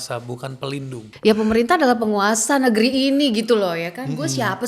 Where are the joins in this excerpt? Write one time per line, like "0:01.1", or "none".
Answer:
0:01.0